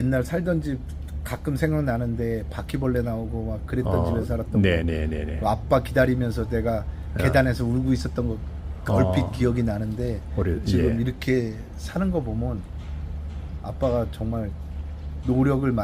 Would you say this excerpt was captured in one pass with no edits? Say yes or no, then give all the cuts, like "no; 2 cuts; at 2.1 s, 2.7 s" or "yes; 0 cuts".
yes; 0 cuts